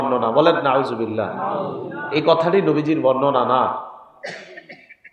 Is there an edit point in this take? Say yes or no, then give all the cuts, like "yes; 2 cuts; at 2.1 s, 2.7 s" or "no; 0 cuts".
no; 0 cuts